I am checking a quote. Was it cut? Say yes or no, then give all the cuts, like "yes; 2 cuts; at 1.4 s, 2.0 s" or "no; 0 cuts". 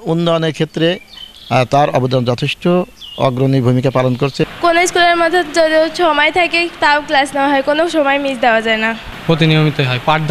yes; 2 cuts; at 4.4 s, 9.1 s